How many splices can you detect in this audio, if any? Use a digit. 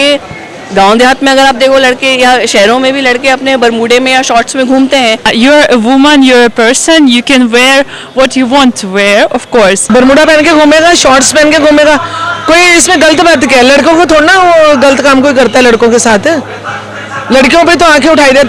2